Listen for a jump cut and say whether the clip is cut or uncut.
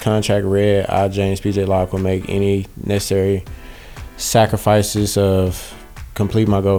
uncut